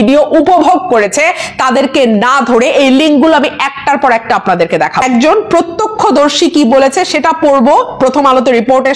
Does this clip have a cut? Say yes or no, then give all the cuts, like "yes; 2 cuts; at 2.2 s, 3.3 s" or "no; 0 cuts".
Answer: no; 0 cuts